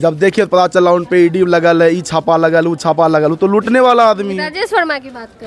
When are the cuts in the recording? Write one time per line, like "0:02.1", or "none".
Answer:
none

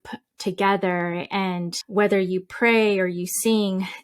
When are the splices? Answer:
0:01.7

